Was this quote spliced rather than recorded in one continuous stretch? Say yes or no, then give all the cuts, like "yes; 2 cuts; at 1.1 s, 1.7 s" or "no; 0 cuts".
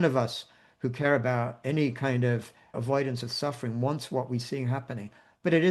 yes; 1 cut; at 2.8 s